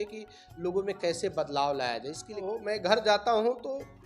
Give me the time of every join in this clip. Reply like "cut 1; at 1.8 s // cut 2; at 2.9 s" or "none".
cut 1; at 2.4 s